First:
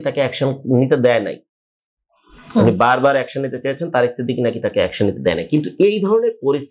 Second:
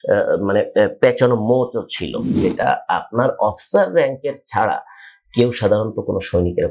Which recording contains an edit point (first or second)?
second